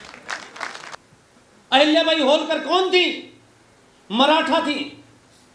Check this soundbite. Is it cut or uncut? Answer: cut